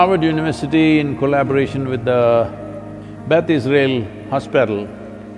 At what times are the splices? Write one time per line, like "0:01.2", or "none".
none